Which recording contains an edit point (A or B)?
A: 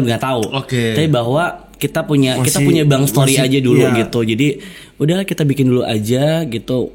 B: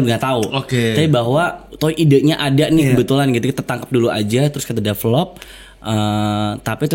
B